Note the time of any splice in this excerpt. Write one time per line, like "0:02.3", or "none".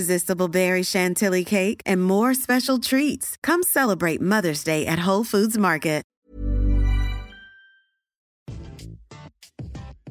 0:08.5